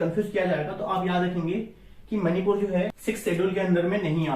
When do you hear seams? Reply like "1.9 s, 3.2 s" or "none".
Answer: 3.0 s